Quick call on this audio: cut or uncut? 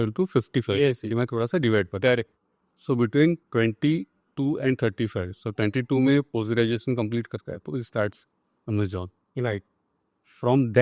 uncut